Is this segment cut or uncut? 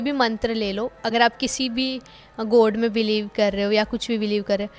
uncut